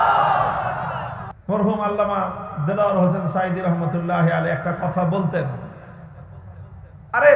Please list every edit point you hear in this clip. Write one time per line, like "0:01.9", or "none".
0:01.1